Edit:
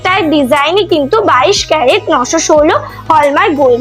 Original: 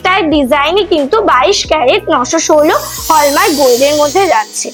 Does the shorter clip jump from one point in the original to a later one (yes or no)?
no